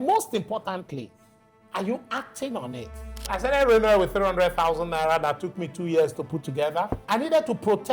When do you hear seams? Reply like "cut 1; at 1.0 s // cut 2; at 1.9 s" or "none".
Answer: cut 1; at 3.3 s // cut 2; at 7.0 s